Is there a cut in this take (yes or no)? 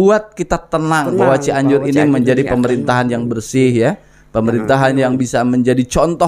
no